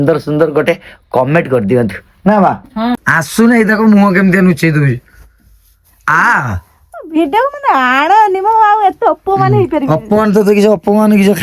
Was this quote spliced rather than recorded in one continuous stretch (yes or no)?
yes